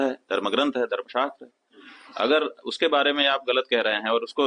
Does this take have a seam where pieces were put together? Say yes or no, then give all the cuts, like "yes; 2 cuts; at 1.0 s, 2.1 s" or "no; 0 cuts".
no; 0 cuts